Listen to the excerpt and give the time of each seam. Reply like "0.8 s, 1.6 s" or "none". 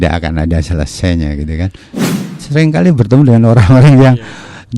2.3 s